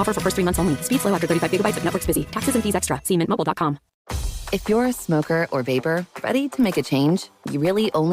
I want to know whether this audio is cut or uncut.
cut